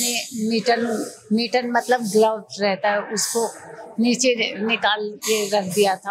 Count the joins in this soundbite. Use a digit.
0